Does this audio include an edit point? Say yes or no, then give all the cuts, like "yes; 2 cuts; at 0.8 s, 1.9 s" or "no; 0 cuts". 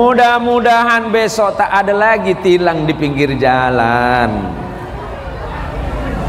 no; 0 cuts